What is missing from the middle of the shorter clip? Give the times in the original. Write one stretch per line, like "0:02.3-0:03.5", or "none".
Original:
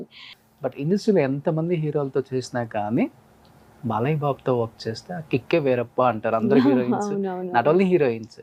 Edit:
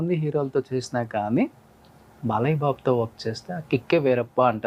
none